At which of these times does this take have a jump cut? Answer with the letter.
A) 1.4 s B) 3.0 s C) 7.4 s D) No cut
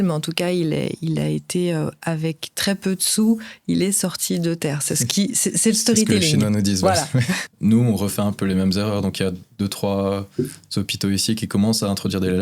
C